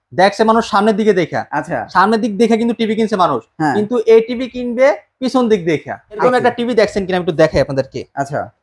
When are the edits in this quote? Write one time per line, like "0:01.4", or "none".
0:06.2

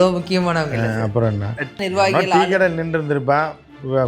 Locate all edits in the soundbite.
0:01.7

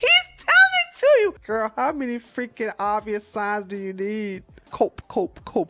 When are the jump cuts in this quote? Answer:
0:01.4
0:04.7

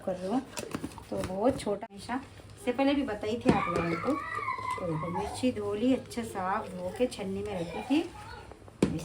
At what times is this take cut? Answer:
0:01.8

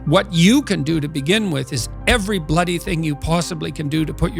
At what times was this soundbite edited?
none

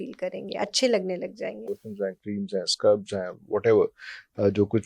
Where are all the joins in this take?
0:01.7

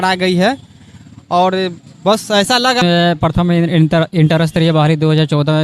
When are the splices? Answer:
0:02.8

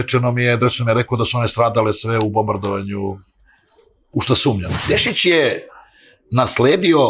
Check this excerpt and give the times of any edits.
0:04.7

